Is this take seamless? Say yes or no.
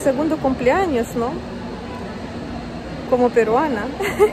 yes